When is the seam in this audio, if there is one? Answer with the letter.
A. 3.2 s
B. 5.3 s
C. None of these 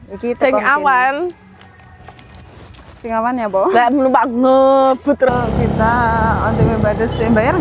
B